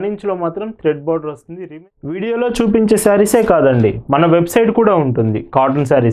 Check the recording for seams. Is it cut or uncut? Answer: cut